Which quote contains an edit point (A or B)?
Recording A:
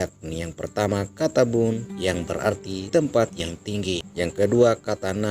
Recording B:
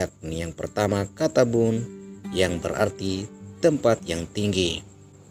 A